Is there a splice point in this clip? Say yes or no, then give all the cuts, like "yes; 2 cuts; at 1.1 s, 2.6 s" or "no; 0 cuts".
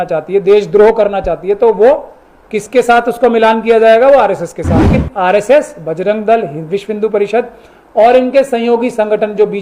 yes; 1 cut; at 5.0 s